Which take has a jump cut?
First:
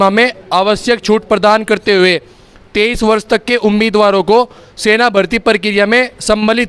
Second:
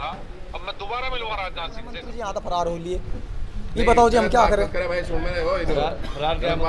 second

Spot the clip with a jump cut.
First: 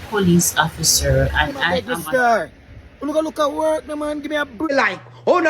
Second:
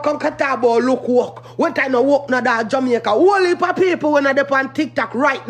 first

